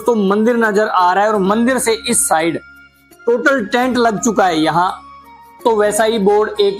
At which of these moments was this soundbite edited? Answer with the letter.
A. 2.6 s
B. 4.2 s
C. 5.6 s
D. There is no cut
C